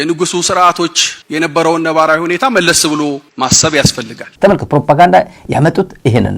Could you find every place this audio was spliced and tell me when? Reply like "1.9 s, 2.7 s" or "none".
4.2 s